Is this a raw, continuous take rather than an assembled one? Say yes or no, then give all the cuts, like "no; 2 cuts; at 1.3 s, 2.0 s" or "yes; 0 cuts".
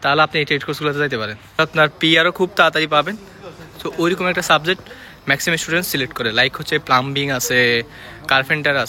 no; 1 cut; at 1.6 s